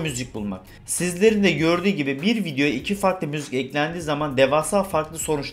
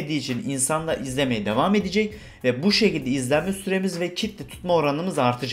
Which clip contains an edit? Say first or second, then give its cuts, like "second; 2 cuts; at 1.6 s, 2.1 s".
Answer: first; 1 cut; at 0.9 s